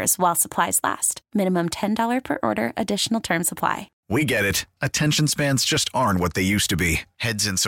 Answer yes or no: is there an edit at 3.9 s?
yes